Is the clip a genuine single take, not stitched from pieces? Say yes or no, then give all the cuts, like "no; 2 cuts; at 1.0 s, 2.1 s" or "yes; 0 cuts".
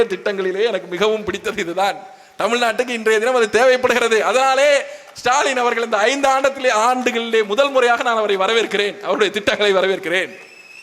yes; 0 cuts